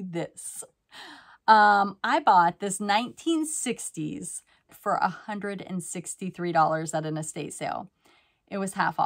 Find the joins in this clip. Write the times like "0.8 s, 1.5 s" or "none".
4.7 s

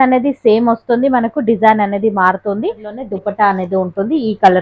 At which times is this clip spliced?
3.0 s

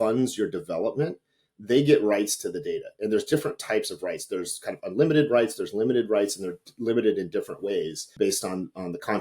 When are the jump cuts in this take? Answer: 8.1 s

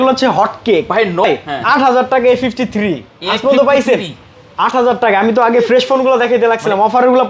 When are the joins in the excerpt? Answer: 1.2 s

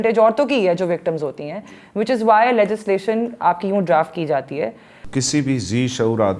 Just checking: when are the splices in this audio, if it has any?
5.0 s

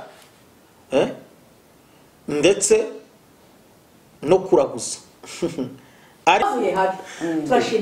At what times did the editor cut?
6.4 s

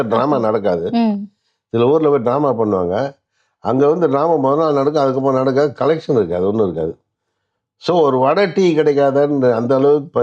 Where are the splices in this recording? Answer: none

